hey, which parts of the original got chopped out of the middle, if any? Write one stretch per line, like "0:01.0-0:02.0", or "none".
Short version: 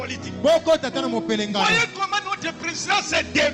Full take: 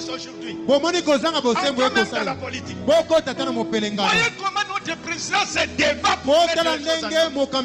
none